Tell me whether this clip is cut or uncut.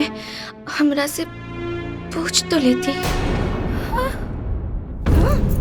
uncut